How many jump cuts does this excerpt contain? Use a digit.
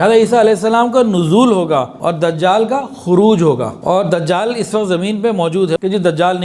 3